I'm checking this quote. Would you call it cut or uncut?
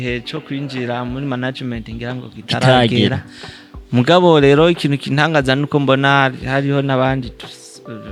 uncut